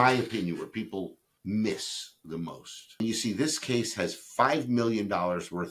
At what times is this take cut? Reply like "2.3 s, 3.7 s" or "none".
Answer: 1.3 s, 3.0 s